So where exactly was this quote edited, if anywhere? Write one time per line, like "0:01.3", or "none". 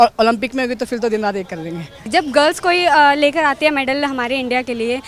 0:02.1